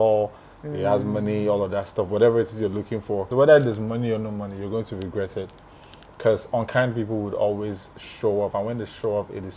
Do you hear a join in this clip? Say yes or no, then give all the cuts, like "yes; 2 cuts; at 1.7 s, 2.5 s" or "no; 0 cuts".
yes; 1 cut; at 3.3 s